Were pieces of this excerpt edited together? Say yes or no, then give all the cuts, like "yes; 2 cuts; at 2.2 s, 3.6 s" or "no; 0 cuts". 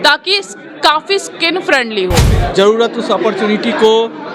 yes; 1 cut; at 2.3 s